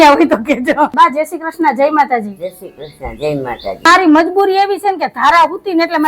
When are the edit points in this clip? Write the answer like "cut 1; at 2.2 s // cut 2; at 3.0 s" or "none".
cut 1; at 0.9 s // cut 2; at 3.9 s